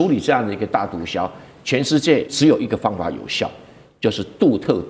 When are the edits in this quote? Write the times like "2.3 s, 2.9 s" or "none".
2.3 s